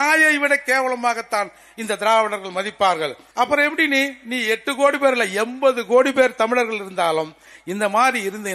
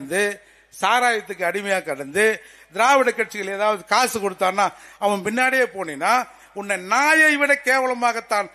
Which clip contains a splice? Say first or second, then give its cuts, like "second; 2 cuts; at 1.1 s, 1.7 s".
first; 1 cut; at 3.2 s